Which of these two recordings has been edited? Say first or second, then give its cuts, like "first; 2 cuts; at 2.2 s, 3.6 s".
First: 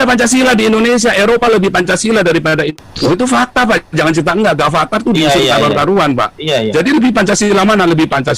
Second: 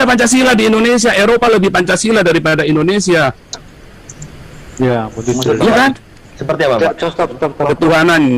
first; 1 cut; at 2.7 s